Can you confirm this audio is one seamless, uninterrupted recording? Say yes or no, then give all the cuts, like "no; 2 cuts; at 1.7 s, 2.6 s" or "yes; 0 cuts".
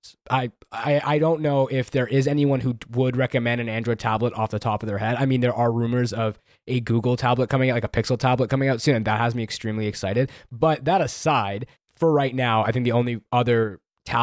yes; 0 cuts